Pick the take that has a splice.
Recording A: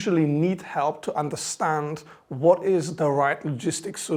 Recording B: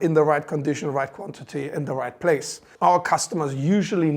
B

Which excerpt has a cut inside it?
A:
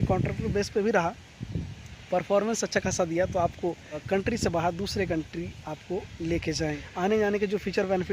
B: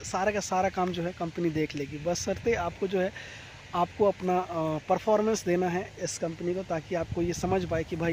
A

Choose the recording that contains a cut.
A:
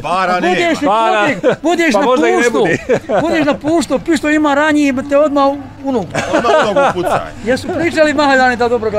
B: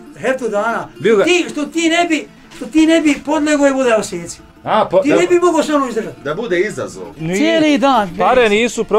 B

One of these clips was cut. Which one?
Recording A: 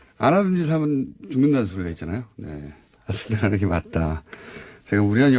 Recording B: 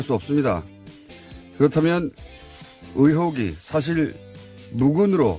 B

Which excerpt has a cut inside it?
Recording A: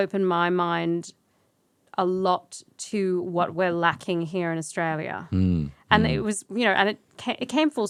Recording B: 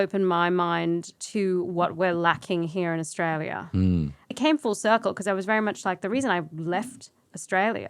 B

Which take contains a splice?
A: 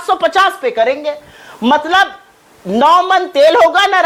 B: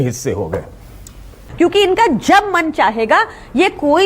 B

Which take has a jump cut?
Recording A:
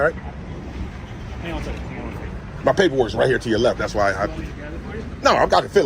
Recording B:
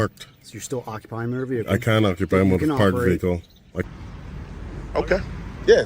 B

